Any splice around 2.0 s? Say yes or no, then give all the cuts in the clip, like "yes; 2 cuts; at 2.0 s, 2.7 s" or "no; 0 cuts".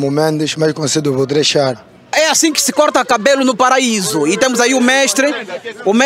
yes; 1 cut; at 2.0 s